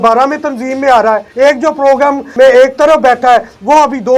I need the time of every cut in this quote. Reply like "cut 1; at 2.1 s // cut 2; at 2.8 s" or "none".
cut 1; at 1.3 s // cut 2; at 2.2 s

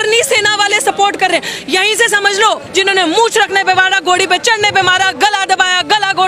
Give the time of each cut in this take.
cut 1; at 2.6 s

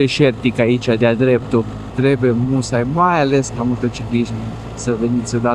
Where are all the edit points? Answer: cut 1; at 1.9 s

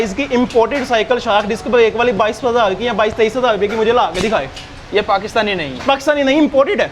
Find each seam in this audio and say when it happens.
none

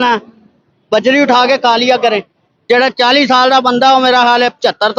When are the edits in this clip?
cut 1; at 2.5 s

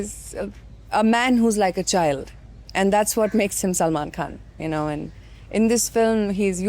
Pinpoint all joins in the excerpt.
none

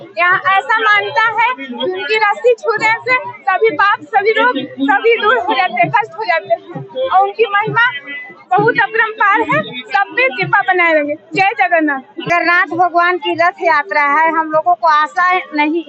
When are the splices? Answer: none

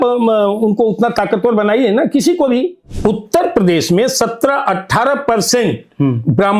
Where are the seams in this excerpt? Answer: cut 1; at 2.8 s

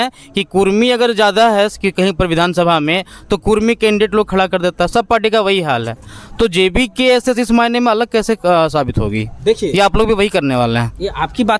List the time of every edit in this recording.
none

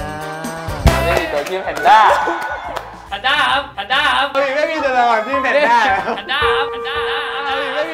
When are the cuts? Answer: cut 1; at 0.9 s // cut 2; at 3.1 s // cut 3; at 4.3 s

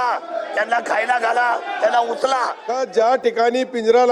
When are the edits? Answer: cut 1; at 2.6 s

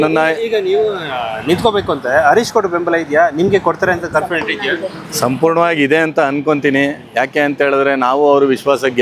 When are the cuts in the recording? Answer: none

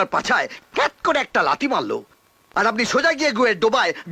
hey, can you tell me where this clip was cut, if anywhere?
none

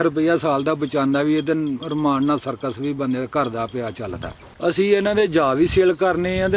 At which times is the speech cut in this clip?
cut 1; at 4.5 s

